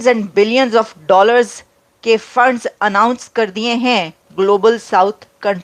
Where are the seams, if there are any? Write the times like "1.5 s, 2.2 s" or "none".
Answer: 4.2 s